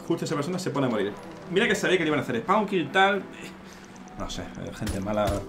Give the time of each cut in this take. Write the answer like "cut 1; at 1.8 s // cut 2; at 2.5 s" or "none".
none